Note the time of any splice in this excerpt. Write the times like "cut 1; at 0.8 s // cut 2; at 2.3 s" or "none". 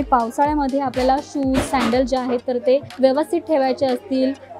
cut 1; at 2.9 s

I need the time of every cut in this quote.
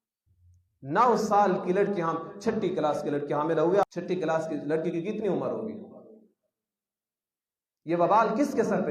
cut 1; at 3.8 s

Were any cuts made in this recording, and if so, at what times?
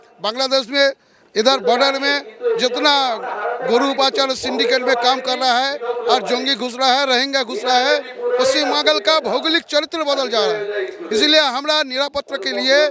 none

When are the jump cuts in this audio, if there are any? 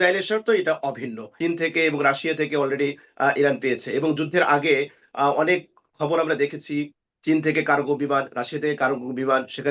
cut 1; at 1.3 s

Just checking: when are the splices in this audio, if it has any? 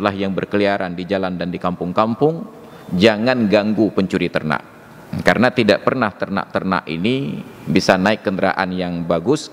none

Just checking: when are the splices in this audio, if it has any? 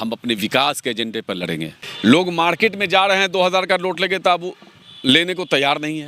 cut 1; at 1.8 s

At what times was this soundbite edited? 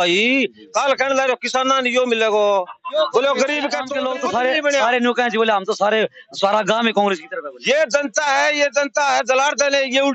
cut 1; at 3.9 s

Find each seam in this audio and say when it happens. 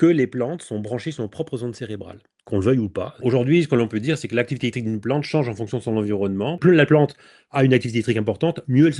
cut 1; at 3.2 s // cut 2; at 6.6 s

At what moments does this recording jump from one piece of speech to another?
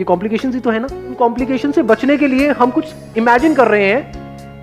cut 1; at 1.1 s

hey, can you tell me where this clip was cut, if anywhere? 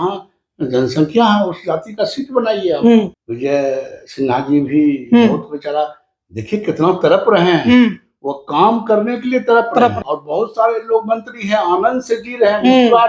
cut 1; at 3.2 s // cut 2; at 10.0 s

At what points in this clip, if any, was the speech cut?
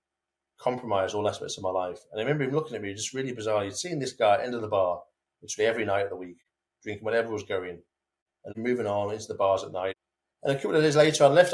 cut 1; at 8.5 s // cut 2; at 10.0 s

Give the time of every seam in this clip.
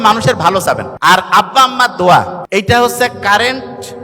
cut 1; at 0.9 s // cut 2; at 2.4 s

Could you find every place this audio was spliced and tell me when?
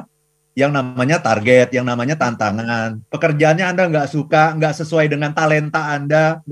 cut 1; at 3.0 s

